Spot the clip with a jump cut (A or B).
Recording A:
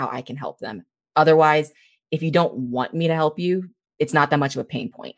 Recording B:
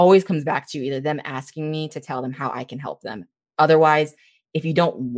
A